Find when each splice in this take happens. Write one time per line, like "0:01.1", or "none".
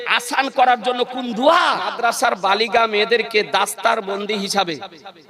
0:02.0